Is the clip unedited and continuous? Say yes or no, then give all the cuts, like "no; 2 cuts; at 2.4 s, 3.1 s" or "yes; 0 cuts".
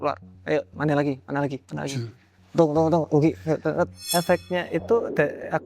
no; 1 cut; at 4.0 s